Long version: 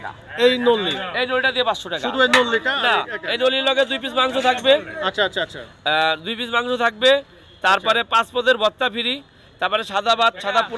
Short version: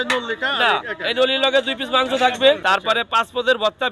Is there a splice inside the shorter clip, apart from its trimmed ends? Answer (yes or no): yes